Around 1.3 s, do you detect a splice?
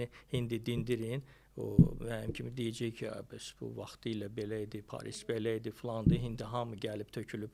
no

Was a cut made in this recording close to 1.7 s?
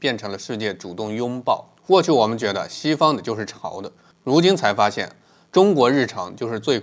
yes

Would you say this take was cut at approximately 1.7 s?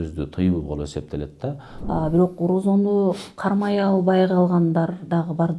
yes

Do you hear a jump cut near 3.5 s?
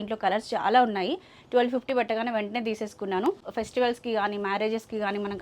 yes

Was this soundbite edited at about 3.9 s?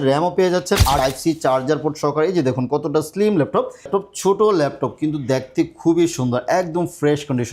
yes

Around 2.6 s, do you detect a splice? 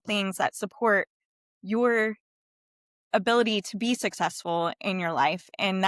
no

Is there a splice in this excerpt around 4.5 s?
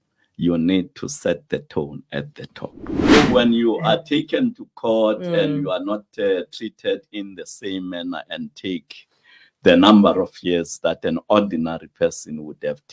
no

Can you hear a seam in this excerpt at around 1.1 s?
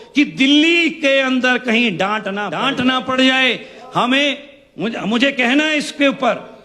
no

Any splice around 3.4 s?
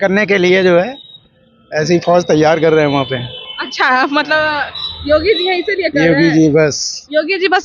no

